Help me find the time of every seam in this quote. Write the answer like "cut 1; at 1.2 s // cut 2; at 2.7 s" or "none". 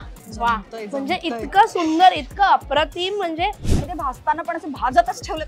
cut 1; at 3.6 s